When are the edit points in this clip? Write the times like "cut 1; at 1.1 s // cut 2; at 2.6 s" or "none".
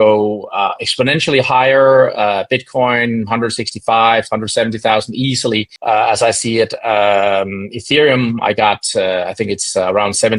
cut 1; at 5.7 s